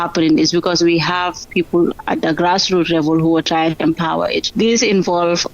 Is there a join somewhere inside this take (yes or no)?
yes